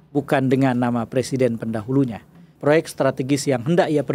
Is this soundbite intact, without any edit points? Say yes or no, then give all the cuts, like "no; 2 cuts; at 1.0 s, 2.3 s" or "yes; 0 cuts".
no; 1 cut; at 2.5 s